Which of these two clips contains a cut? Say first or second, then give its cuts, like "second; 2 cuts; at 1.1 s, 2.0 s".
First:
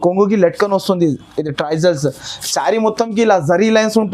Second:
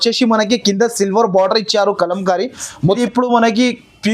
second; 1 cut; at 2.9 s